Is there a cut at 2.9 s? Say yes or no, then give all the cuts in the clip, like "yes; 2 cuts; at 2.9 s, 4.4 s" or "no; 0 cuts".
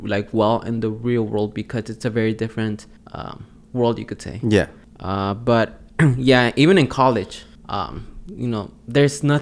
no; 0 cuts